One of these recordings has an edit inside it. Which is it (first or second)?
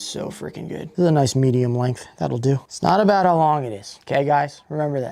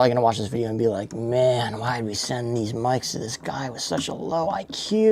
first